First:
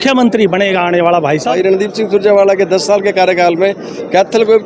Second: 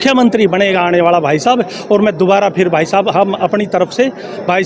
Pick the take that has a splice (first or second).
first